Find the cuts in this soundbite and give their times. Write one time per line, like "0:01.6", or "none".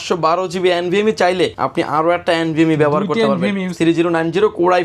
0:01.6
0:03.7